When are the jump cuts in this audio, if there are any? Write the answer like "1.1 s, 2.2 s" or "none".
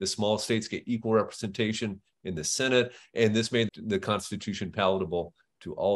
3.7 s